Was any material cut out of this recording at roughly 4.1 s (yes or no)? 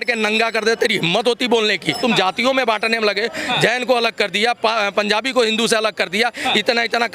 no